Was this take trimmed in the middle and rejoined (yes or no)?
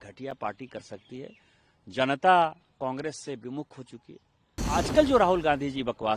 yes